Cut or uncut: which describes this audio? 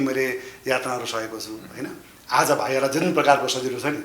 uncut